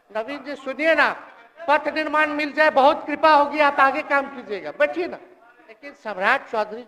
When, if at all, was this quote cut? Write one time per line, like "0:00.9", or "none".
0:05.9